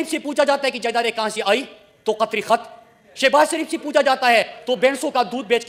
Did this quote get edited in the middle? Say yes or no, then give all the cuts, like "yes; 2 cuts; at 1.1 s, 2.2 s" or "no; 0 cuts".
no; 0 cuts